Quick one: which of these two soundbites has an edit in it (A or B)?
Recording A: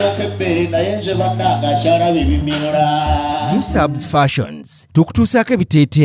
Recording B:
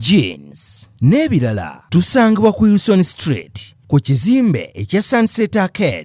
A